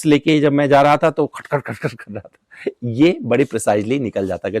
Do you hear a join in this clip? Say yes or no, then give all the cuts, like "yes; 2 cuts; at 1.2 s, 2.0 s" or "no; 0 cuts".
no; 0 cuts